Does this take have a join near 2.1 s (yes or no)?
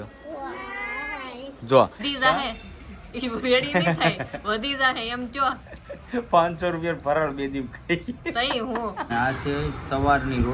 yes